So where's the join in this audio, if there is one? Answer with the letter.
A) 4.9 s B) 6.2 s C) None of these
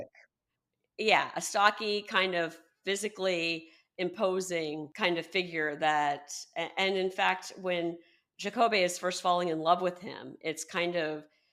A